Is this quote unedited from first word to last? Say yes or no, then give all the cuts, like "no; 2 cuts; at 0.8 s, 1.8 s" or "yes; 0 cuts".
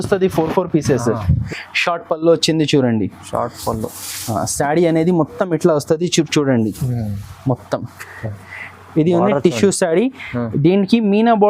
no; 1 cut; at 1.4 s